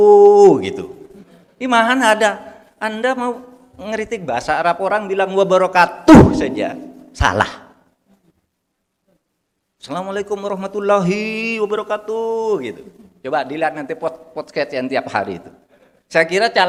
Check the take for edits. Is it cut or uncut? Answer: uncut